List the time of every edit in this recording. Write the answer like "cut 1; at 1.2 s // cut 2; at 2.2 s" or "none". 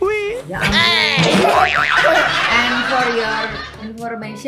none